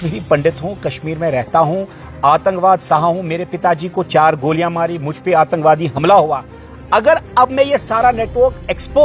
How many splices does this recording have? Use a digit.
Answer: 0